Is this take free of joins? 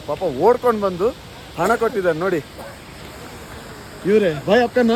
yes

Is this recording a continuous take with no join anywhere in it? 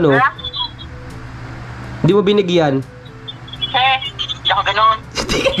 yes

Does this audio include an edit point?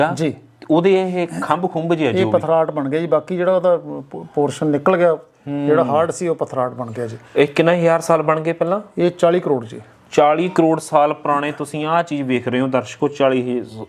no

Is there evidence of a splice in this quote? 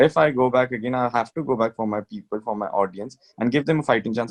no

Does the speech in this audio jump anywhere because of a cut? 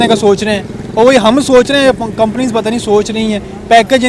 no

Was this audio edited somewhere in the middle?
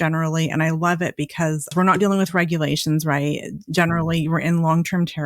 yes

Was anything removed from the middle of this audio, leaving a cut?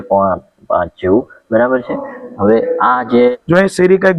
yes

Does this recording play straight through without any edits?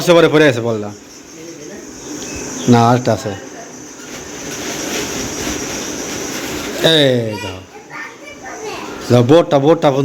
yes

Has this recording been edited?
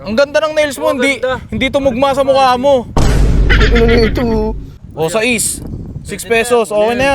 yes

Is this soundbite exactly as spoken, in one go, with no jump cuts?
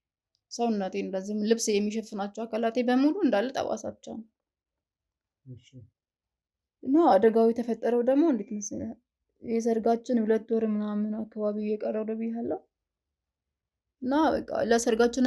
yes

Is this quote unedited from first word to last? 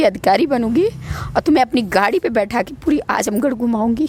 yes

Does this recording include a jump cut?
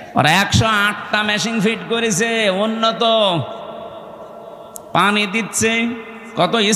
no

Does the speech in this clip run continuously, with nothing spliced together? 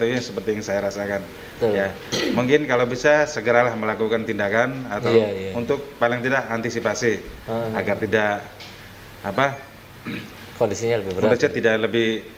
yes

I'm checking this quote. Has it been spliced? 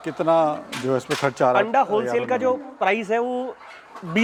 no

